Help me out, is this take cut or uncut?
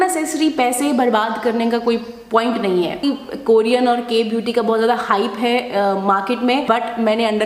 cut